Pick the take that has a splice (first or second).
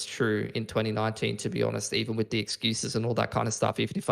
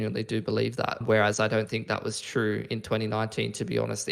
second